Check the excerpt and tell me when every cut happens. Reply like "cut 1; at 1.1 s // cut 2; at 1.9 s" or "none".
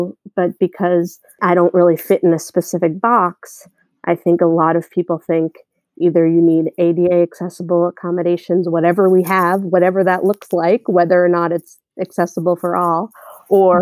cut 1; at 1.4 s

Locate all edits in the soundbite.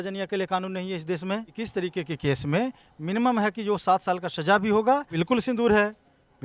cut 1; at 1.6 s // cut 2; at 5.2 s

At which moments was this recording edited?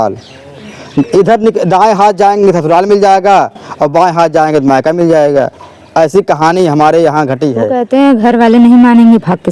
cut 1; at 7.7 s

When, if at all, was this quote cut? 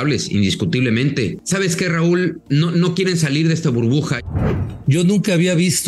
cut 1; at 1.3 s // cut 2; at 2.4 s // cut 3; at 4.3 s

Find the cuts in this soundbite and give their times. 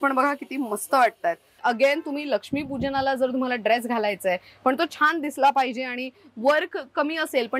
cut 1; at 1.5 s

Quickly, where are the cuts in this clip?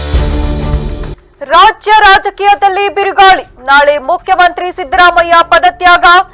cut 1; at 1.1 s

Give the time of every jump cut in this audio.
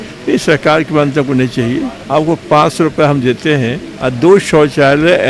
cut 1; at 2.0 s // cut 2; at 3.9 s

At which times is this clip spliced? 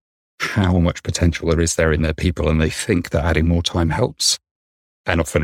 none

